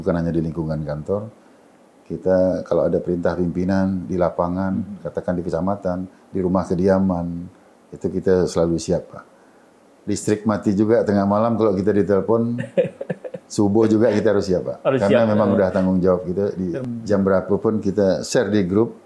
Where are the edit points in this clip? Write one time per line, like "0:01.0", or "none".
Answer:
0:16.8